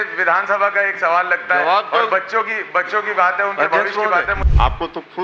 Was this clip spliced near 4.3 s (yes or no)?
yes